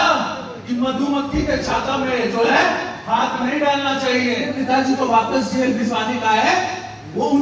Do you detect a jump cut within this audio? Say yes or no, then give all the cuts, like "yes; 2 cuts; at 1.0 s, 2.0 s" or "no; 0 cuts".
yes; 1 cut; at 4.5 s